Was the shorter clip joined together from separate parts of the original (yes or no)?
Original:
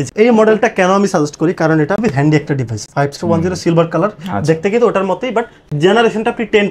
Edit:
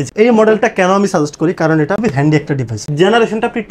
yes